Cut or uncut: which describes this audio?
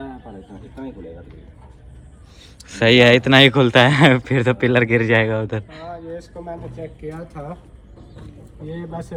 uncut